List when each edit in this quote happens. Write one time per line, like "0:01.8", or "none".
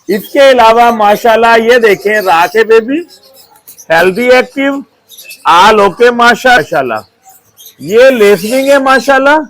0:06.6